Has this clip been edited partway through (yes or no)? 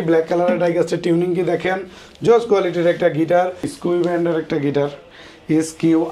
yes